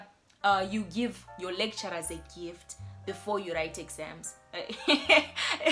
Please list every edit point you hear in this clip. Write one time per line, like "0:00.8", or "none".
none